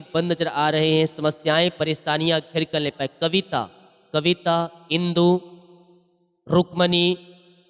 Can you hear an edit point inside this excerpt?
yes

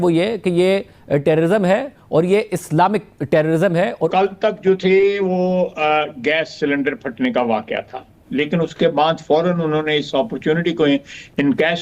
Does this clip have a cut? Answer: yes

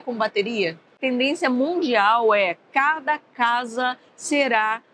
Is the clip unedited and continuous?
no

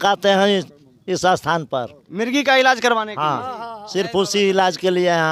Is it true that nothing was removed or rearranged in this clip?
yes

